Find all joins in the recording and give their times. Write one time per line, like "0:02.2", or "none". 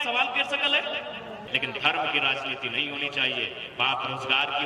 0:01.4